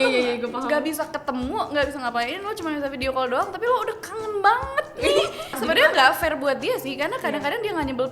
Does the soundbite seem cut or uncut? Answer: cut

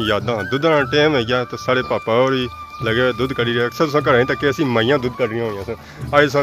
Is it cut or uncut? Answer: uncut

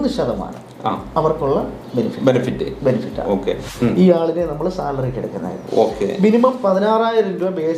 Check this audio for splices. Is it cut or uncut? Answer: cut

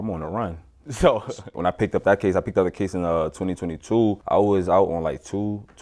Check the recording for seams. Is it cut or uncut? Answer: cut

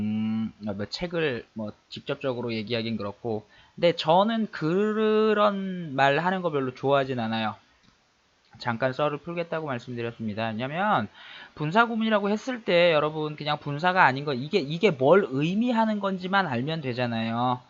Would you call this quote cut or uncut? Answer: cut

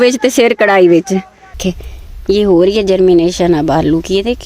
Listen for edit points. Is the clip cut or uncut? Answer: cut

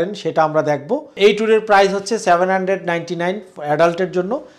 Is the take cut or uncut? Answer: cut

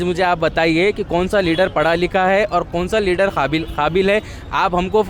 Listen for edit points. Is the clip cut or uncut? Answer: uncut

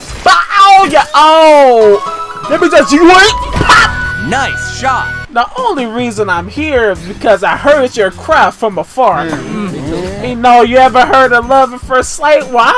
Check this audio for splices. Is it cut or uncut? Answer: cut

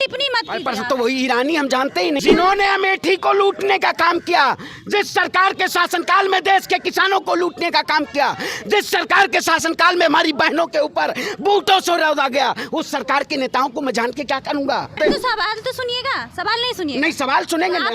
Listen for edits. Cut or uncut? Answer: cut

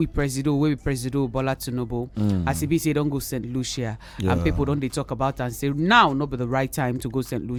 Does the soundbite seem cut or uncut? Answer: uncut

